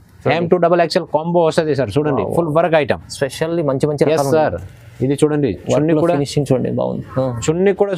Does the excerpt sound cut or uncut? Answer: uncut